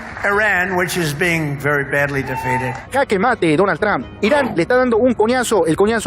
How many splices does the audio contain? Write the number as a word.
one